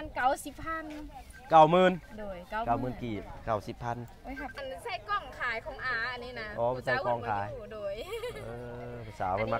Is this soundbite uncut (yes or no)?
no